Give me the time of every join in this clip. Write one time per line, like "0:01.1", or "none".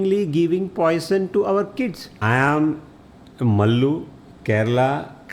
0:02.1